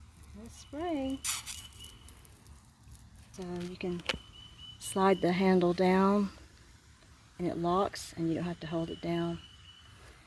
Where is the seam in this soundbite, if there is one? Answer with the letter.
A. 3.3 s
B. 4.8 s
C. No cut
A